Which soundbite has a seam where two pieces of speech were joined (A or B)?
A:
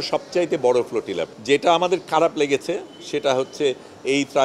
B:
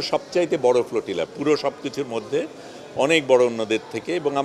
A